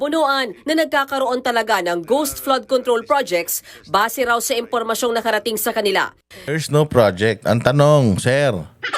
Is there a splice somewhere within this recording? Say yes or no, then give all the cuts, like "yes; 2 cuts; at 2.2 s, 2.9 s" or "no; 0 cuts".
yes; 1 cut; at 6.3 s